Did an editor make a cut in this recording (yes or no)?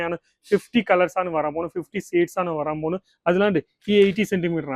no